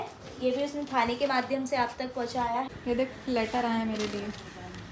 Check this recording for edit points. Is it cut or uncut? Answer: cut